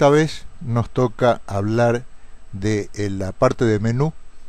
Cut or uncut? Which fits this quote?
cut